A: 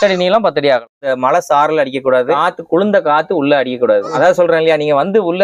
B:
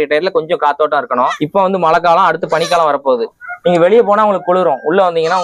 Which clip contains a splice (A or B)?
A